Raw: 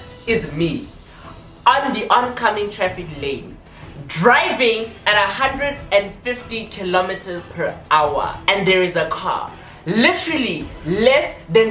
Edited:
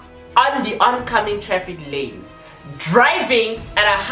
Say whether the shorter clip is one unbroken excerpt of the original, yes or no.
yes